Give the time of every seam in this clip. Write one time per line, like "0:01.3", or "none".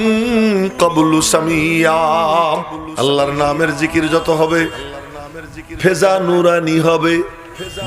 0:02.8